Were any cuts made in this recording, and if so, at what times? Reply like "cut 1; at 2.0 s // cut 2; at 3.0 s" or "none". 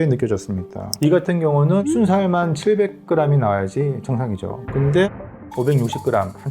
cut 1; at 0.9 s